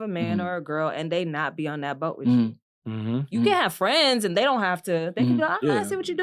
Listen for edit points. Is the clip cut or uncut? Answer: uncut